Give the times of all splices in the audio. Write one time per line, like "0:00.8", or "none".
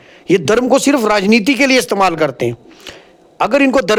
none